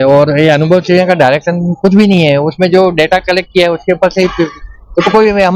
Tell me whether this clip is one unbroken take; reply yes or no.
yes